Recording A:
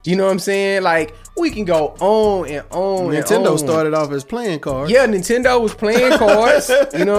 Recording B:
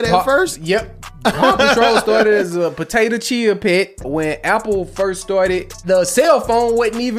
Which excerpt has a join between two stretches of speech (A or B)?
B